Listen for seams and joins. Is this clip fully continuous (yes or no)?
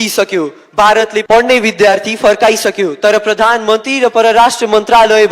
no